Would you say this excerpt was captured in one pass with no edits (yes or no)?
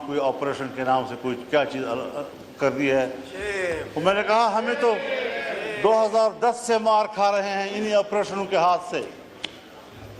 yes